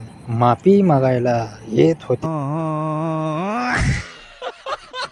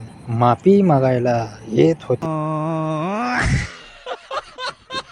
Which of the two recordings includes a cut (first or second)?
second